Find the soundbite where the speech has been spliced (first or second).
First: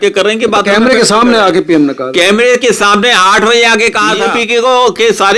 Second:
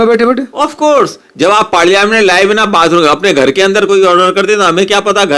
first